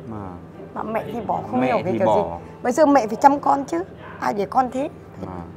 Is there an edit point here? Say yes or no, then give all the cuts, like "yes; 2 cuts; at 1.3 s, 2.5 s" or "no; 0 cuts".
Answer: no; 0 cuts